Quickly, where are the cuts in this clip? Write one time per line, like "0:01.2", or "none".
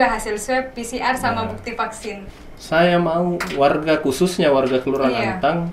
0:02.3